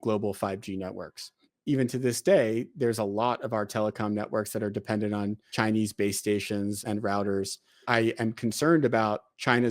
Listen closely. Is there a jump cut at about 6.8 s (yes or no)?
yes